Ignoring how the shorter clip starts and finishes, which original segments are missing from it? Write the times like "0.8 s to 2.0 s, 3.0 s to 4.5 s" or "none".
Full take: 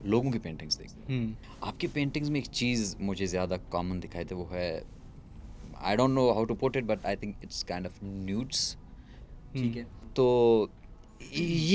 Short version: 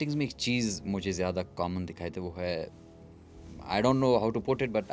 none